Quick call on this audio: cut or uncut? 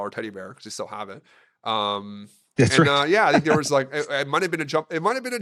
uncut